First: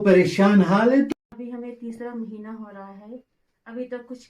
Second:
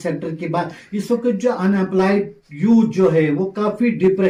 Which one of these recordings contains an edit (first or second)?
first